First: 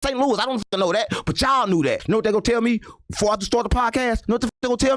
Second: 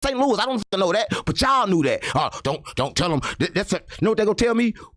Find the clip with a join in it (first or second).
first